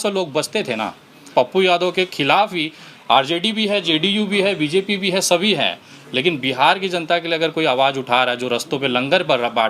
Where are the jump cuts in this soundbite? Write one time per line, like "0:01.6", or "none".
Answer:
0:01.3